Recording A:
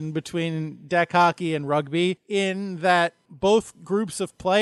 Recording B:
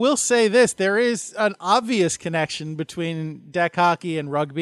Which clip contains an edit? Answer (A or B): A